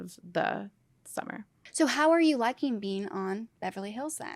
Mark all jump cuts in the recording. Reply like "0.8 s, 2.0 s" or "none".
1.6 s